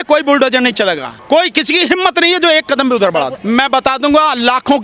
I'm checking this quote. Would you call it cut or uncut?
cut